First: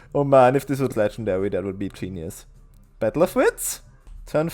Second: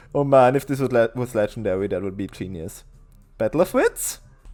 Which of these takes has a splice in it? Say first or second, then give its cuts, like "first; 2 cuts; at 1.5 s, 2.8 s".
first; 1 cut; at 0.9 s